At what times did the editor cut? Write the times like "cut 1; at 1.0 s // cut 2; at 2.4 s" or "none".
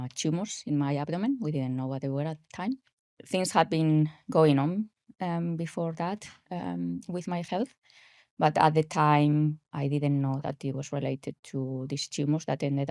cut 1; at 2.9 s